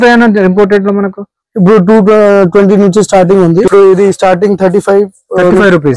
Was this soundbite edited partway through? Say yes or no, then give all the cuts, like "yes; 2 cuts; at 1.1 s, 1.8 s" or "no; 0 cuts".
yes; 1 cut; at 3.7 s